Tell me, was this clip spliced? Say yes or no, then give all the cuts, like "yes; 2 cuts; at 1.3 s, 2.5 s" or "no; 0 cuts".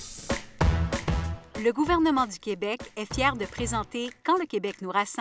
yes; 1 cut; at 1.3 s